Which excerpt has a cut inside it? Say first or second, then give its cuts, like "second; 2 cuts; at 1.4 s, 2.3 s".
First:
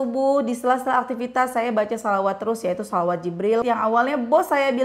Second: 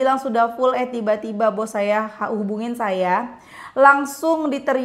first; 1 cut; at 3.6 s